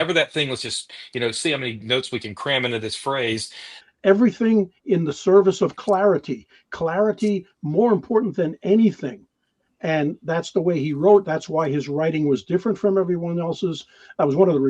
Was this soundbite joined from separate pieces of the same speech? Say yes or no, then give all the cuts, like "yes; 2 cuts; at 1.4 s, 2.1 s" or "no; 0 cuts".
yes; 1 cut; at 3.9 s